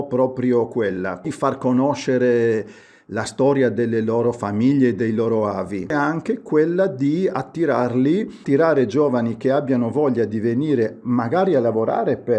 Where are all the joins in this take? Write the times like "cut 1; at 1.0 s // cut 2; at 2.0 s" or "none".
cut 1; at 1.3 s // cut 2; at 5.9 s // cut 3; at 8.4 s